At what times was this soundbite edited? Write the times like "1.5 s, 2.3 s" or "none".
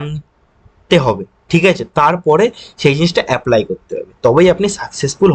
none